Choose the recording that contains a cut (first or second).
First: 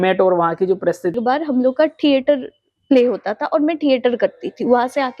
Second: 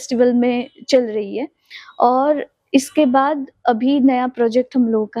first